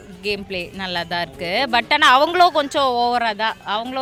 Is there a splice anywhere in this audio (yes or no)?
no